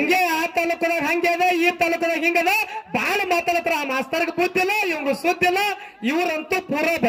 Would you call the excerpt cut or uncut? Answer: uncut